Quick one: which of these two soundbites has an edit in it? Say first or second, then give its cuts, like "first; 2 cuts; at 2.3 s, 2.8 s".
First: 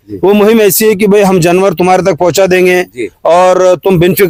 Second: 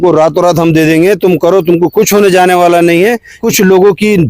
second; 1 cut; at 3.4 s